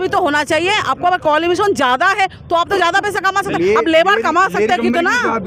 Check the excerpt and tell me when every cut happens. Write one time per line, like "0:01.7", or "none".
none